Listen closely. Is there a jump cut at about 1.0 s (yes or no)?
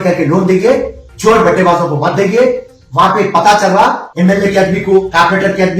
no